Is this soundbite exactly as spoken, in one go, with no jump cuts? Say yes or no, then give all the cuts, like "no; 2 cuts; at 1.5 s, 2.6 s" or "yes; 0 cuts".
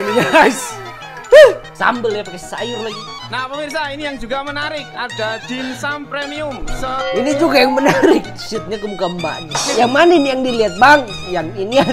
no; 2 cuts; at 3.3 s, 9.6 s